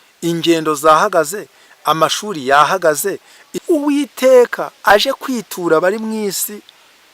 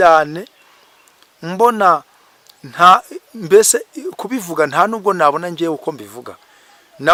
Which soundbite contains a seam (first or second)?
first